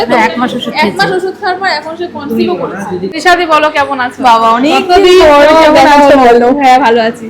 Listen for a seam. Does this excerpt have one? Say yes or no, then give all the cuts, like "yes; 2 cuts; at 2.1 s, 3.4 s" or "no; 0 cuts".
yes; 1 cut; at 3.2 s